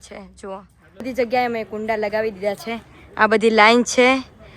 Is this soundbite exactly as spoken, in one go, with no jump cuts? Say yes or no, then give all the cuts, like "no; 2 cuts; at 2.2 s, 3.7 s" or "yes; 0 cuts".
no; 1 cut; at 1.1 s